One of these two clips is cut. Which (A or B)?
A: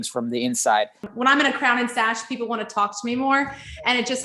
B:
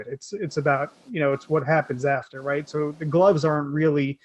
A